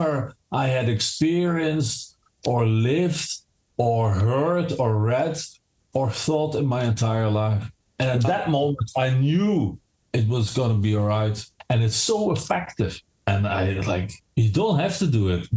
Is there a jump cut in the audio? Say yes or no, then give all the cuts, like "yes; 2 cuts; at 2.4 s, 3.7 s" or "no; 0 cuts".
yes; 1 cut; at 11.5 s